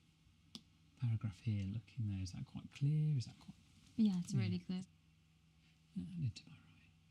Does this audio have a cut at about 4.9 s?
yes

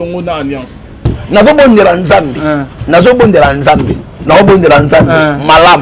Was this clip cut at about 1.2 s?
yes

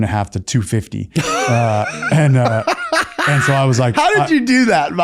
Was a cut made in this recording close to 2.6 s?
no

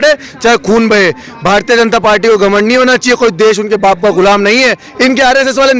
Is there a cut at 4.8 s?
yes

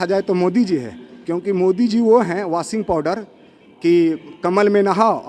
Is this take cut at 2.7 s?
no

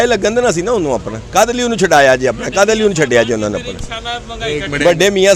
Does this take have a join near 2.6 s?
no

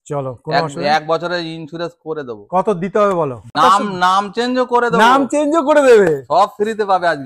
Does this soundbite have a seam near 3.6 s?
yes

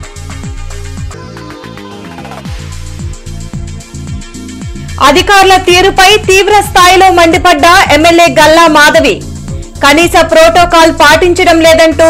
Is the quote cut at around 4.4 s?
yes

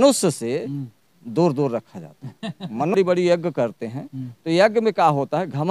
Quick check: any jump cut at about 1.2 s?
no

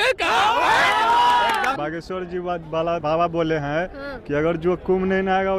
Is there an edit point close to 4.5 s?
no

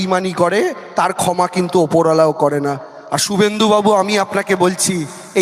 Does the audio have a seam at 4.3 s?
no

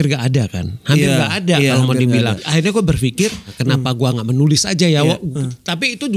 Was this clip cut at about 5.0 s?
no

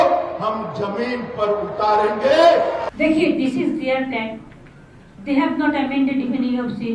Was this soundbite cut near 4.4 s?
no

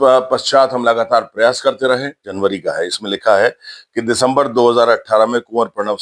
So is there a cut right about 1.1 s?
no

